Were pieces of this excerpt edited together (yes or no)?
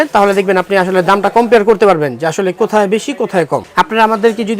yes